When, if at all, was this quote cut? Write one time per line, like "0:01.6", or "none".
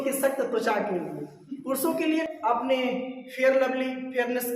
0:02.3